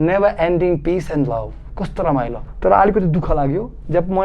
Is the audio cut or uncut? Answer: cut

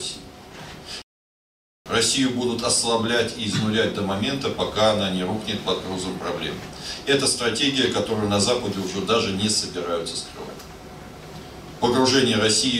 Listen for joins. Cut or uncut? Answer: cut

